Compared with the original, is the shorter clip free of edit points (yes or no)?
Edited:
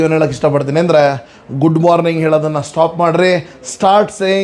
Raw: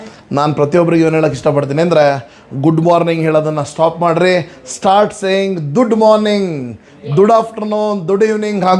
yes